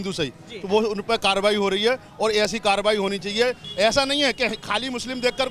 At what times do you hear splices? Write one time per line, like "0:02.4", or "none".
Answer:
0:03.6